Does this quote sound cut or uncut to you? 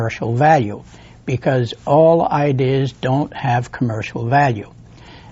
cut